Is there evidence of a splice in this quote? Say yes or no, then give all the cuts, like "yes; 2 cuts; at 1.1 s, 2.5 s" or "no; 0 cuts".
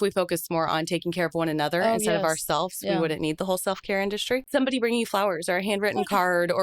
yes; 1 cut; at 4.4 s